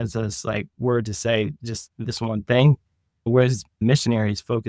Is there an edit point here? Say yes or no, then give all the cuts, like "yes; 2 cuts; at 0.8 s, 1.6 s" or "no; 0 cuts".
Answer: no; 0 cuts